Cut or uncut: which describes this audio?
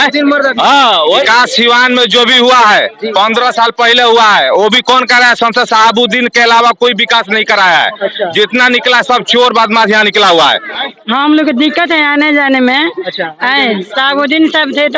cut